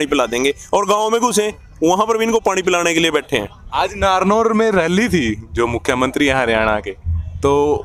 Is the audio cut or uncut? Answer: uncut